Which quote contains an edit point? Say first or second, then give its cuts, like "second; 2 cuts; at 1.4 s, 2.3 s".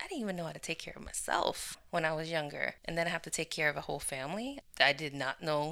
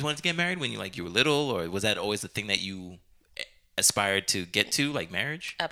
first; 3 cuts; at 1.8 s, 2.8 s, 4.6 s